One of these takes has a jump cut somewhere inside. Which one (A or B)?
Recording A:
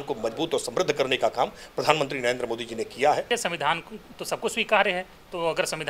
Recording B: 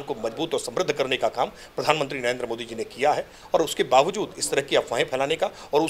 A